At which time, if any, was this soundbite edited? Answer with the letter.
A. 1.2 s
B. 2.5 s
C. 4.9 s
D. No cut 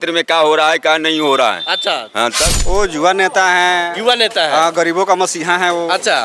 B